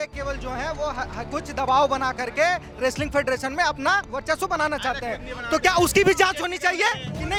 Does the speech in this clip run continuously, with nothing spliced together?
yes; 0 cuts

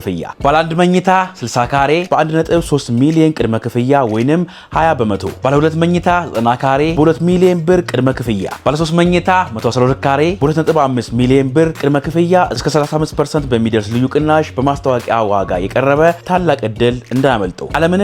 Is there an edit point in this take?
no; 0 cuts

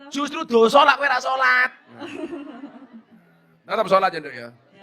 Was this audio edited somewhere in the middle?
no; 0 cuts

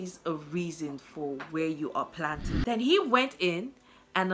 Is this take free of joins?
no; 1 cut; at 2.5 s

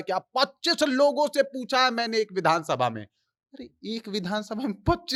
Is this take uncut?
yes; 0 cuts

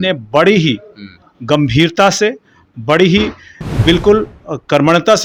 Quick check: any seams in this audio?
no; 0 cuts

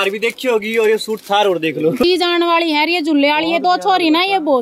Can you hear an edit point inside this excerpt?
yes; 1 cut; at 2.0 s

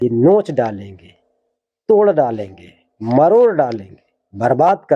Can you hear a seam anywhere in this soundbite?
no; 0 cuts

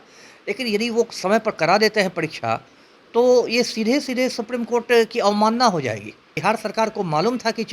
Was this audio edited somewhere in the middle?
yes; 1 cut; at 6.3 s

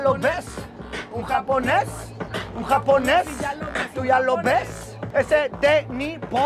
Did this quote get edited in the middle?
no; 0 cuts

